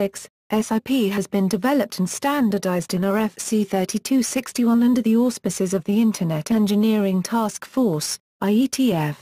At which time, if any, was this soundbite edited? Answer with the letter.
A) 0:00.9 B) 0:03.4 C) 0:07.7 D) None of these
B